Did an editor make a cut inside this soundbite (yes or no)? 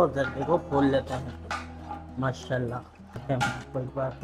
yes